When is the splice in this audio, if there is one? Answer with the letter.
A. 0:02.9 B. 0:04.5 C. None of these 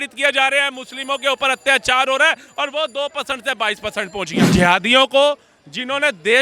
B